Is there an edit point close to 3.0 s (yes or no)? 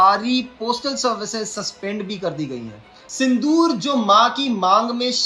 yes